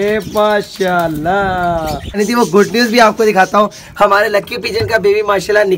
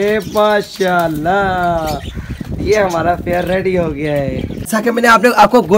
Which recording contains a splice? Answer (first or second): first